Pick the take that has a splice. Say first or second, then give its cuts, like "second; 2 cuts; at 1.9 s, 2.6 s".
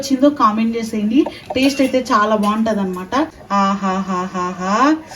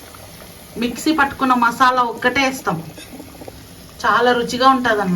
first; 1 cut; at 3.4 s